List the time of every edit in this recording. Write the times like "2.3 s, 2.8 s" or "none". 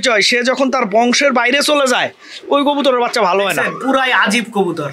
3.7 s